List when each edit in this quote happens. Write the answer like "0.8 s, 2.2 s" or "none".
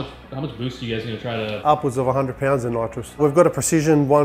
1.5 s, 3.2 s